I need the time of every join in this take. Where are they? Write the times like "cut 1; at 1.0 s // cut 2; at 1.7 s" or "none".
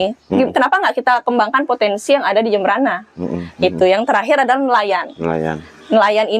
none